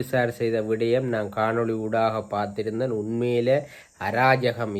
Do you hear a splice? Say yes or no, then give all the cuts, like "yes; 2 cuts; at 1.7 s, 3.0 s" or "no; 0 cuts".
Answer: no; 0 cuts